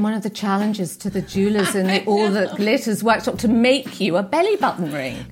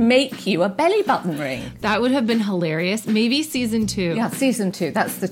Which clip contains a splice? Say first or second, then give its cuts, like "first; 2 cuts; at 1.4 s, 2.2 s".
second; 1 cut; at 4.1 s